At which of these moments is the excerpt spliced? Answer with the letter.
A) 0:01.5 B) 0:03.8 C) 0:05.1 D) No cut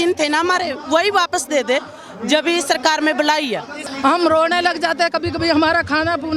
B